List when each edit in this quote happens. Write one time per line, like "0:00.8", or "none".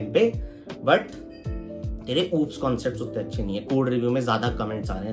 none